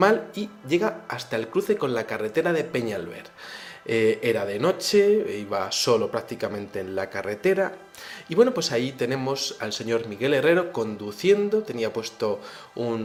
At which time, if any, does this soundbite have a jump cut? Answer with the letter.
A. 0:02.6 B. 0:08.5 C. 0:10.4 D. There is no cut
D